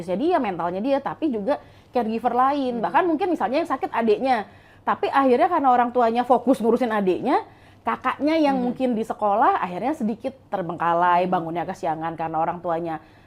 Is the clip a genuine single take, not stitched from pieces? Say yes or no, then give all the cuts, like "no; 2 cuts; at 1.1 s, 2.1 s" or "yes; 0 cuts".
yes; 0 cuts